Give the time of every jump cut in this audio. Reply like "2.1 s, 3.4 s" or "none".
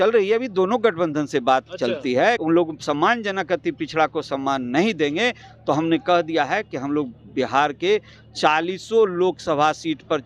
2.4 s

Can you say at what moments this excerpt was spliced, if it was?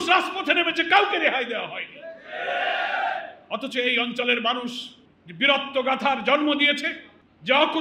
none

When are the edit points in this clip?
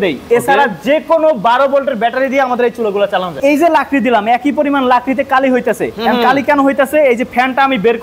3.4 s

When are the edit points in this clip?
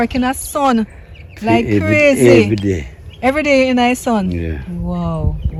none

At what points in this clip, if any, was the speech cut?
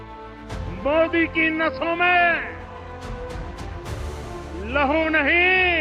0.8 s, 2.9 s, 4.2 s

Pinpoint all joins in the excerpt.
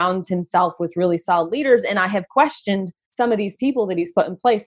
3.0 s

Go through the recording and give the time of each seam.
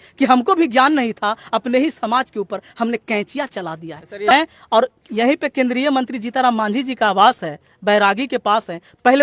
4.3 s

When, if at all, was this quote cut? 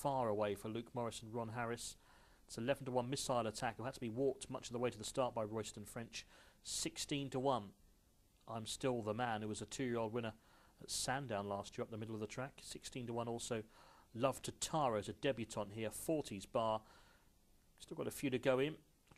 none

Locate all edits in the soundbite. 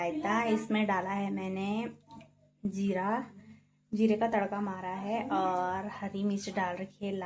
none

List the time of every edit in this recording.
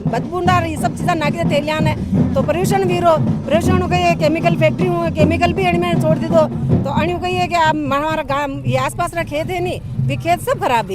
none

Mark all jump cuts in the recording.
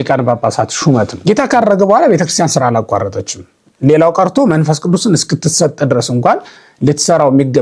1.1 s

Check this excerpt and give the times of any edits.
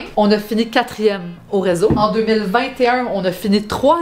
none

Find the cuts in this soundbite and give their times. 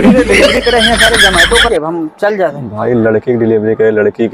1.7 s

